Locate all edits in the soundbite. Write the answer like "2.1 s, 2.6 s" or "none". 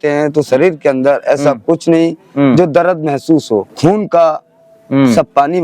3.7 s